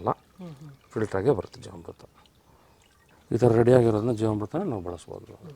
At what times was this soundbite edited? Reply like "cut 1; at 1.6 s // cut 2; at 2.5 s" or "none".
none